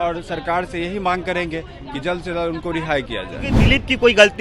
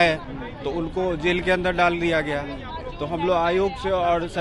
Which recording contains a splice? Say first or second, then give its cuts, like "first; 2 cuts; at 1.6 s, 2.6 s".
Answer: first; 1 cut; at 3.5 s